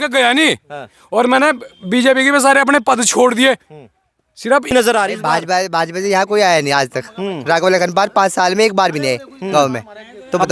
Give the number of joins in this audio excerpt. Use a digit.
1